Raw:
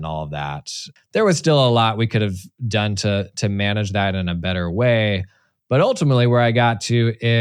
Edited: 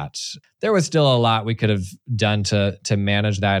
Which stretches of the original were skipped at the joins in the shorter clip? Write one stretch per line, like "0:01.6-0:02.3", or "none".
none